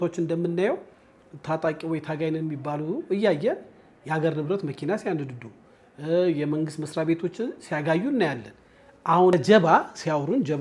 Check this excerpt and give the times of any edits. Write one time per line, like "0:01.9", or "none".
none

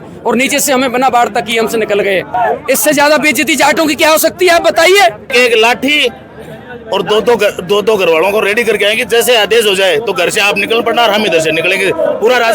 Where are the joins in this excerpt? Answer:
0:02.3
0:05.3

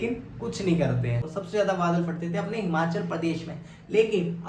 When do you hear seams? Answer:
0:01.2

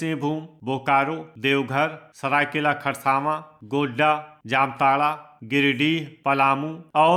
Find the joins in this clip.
none

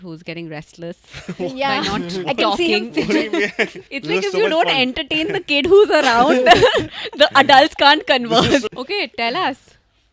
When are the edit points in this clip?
0:03.9
0:08.7

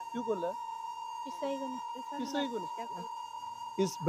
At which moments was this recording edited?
0:03.1

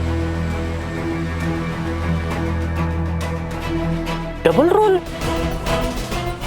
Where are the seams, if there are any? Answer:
0:03.7
0:05.2

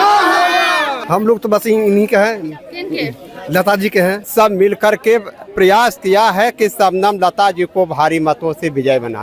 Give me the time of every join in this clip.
0:01.0
0:04.2

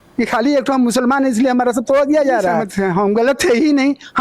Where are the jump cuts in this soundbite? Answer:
0:02.7

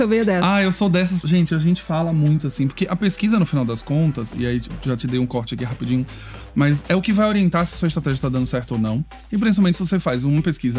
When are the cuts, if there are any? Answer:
0:01.2

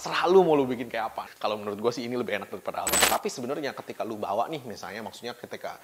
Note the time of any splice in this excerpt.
0:01.3
0:03.0

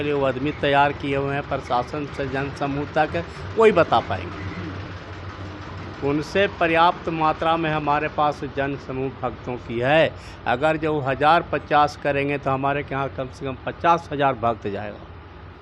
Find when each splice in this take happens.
none

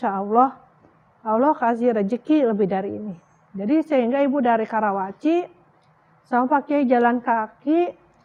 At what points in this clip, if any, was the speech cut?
none

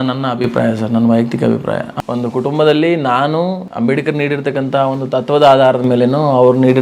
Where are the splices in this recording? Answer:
0:01.9
0:03.7

